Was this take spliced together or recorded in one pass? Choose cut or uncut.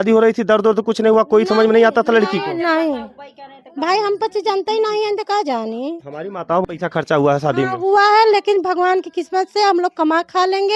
cut